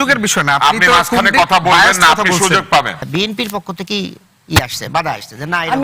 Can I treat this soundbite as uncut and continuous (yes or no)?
no